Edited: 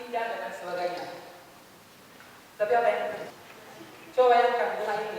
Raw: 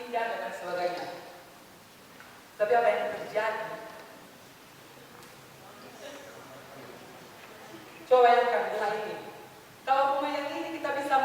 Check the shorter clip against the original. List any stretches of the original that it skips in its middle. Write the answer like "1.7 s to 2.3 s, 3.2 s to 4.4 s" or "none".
3.2 s to 7.2 s